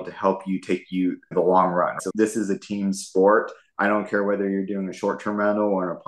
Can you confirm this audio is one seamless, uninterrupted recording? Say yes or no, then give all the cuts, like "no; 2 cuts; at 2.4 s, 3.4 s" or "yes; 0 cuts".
yes; 0 cuts